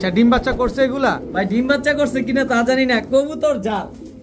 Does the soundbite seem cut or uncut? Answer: uncut